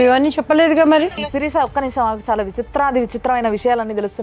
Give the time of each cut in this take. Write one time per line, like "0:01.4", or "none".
0:01.1